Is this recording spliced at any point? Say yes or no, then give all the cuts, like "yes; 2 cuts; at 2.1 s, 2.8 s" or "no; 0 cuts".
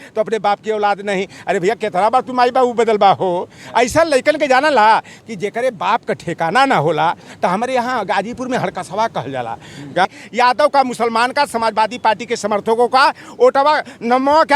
yes; 1 cut; at 10.0 s